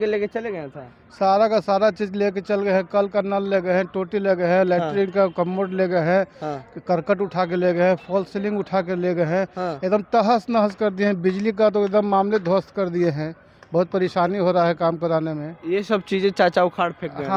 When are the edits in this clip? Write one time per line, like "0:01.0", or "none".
none

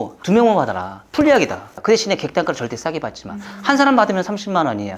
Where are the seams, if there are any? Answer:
0:01.7

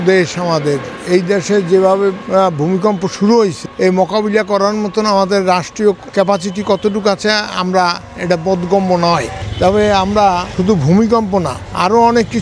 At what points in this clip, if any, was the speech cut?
none

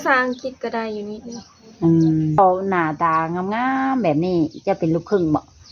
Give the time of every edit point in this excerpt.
0:02.4

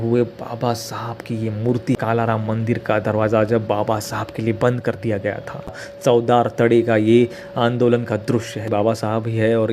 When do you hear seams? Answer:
0:02.0
0:05.9
0:08.7

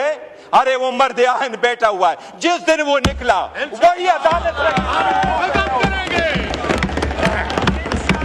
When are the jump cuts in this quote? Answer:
none

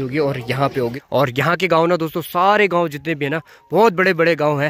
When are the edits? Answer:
0:01.0

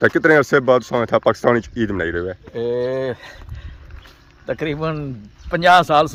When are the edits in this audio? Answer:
none

